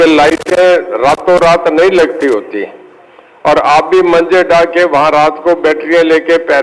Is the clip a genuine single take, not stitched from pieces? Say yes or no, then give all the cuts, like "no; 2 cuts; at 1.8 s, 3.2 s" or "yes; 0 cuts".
yes; 0 cuts